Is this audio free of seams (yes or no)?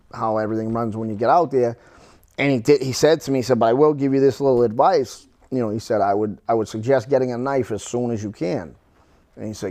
yes